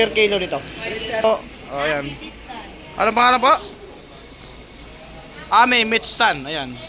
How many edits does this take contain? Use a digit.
1